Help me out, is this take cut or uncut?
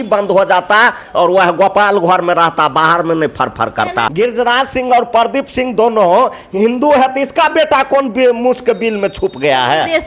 cut